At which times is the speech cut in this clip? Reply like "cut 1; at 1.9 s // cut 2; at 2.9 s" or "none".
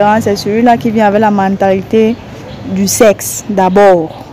none